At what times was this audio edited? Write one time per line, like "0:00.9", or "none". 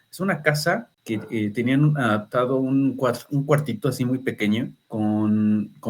0:00.9
0:04.8